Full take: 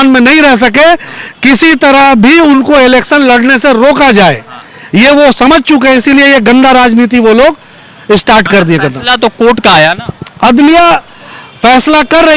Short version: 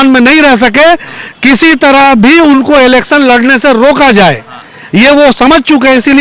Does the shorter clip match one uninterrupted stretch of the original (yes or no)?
yes